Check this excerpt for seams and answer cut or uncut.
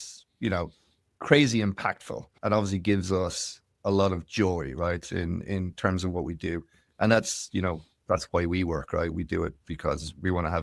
cut